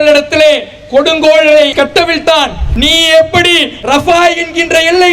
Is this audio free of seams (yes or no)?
no